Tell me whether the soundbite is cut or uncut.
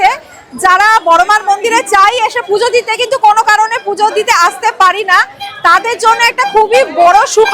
uncut